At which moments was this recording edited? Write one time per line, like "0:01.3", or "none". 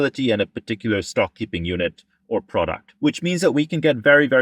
0:02.8